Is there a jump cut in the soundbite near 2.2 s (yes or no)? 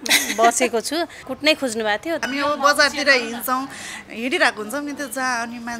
yes